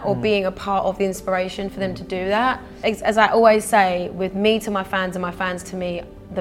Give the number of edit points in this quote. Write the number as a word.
one